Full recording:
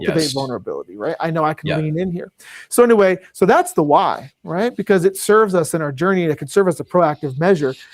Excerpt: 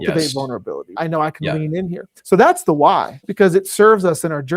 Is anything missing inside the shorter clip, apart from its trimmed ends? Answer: yes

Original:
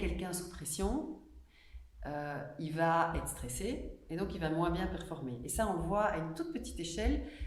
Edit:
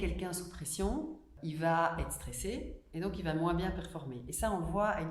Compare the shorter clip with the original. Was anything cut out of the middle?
yes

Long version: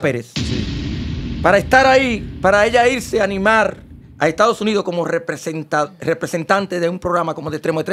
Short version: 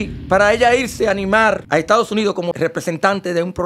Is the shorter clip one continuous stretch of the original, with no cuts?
no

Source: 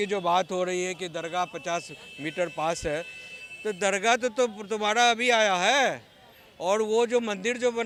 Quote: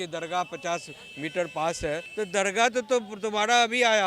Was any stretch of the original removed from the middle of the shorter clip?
yes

